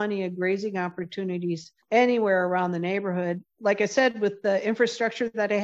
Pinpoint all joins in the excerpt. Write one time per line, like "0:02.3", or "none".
0:01.7
0:03.5